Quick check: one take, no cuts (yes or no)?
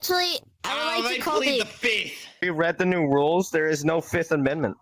no